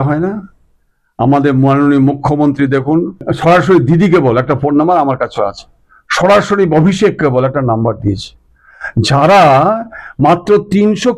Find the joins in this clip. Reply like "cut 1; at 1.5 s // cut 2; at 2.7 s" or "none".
cut 1; at 3.2 s